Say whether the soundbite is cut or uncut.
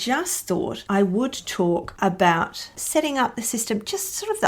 cut